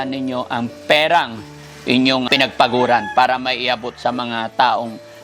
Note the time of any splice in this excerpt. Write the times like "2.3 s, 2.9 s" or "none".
2.3 s